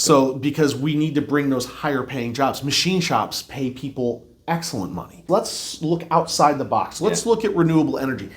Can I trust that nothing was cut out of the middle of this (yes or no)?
no